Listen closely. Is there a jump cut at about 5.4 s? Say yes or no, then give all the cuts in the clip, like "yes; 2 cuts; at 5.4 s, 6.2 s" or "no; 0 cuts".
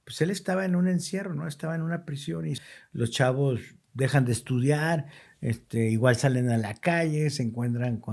no; 1 cut; at 2.6 s